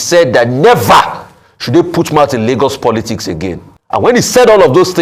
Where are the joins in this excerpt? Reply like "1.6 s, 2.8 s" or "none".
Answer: 4.1 s

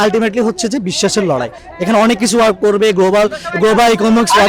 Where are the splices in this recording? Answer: none

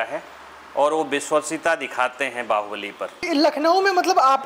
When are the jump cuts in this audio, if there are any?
3.3 s

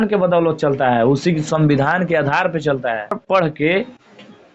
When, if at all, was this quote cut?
3.2 s

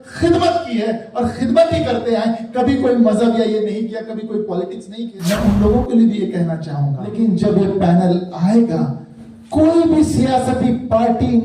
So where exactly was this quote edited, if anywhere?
5.1 s, 7.1 s

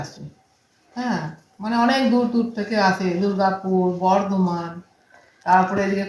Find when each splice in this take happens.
none

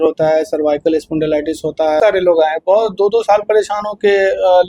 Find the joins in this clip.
2.0 s

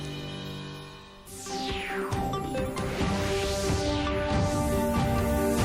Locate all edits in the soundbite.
1.1 s

